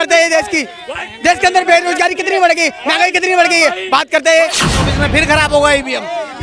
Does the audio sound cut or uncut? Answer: cut